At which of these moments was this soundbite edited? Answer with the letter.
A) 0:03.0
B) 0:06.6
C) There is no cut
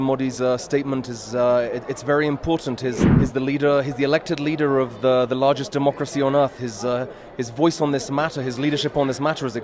A